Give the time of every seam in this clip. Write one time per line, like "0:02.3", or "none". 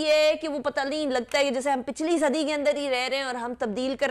none